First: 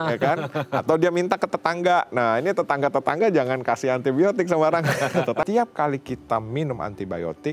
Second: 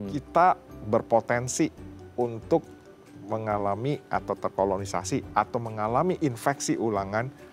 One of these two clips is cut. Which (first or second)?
first